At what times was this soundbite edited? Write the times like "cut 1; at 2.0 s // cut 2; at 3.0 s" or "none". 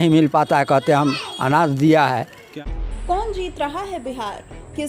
cut 1; at 2.5 s